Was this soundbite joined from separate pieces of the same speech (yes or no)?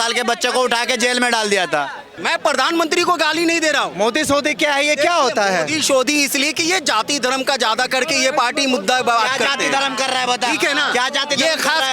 yes